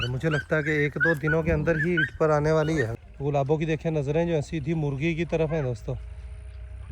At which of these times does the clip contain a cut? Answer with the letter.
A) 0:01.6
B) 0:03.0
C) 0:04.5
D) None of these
B